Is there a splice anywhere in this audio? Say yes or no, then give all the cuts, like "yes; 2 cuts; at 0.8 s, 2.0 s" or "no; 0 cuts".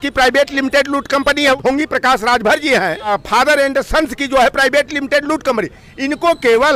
yes; 2 cuts; at 1.6 s, 3.1 s